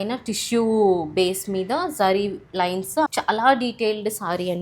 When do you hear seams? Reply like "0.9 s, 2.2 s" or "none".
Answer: 3.1 s